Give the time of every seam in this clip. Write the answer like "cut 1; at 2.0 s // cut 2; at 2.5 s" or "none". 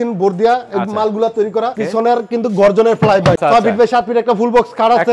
cut 1; at 1.8 s // cut 2; at 3.4 s